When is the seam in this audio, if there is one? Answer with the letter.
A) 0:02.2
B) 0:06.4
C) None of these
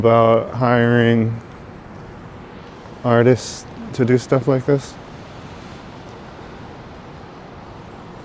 C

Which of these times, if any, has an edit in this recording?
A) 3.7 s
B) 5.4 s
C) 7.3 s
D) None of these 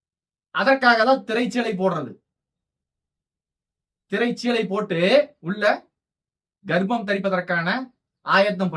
B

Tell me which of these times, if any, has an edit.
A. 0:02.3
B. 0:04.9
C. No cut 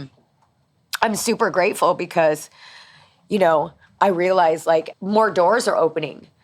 B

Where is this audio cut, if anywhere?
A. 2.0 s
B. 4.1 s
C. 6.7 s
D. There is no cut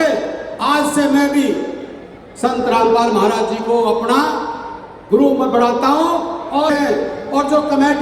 C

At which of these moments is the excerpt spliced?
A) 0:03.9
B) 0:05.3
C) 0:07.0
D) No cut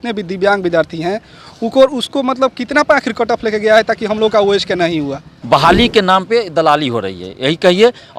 B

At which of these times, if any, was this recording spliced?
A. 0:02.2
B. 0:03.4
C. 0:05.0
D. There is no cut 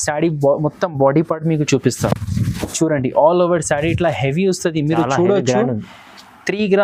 D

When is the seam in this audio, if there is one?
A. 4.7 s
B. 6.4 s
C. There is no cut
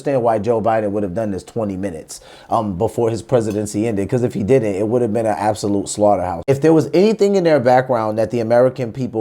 B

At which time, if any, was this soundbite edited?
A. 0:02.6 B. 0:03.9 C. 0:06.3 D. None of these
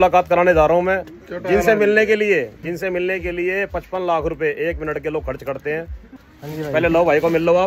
C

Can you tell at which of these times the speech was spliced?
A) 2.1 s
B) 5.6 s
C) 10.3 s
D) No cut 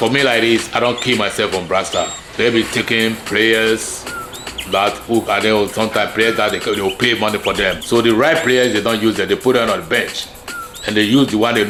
D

